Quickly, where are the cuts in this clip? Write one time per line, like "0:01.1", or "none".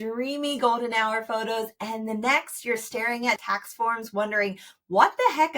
0:03.4

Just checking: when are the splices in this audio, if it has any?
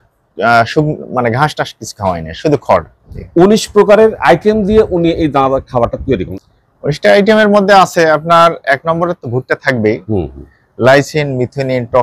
0:03.1
0:06.3

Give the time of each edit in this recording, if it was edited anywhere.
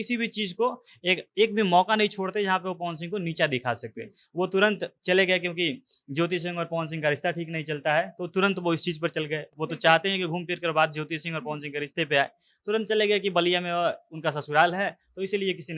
none

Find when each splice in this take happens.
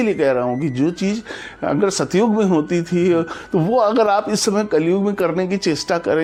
none

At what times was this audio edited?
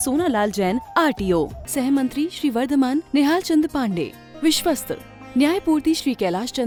none

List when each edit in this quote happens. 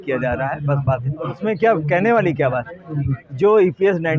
0:01.4

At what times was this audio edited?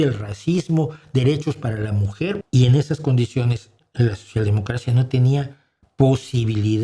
0:02.4

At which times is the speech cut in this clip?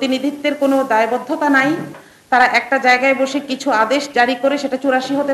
none

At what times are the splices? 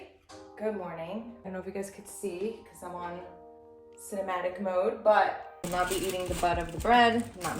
0:01.5
0:05.5

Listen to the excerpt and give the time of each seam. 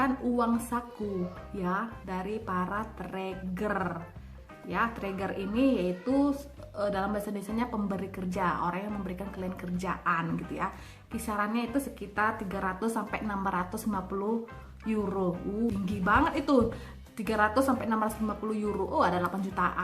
0:15.7

